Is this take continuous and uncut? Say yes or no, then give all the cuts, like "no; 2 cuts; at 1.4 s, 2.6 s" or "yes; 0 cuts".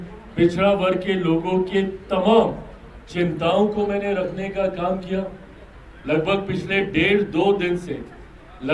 yes; 0 cuts